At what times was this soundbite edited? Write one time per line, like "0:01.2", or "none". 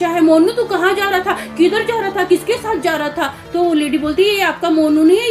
none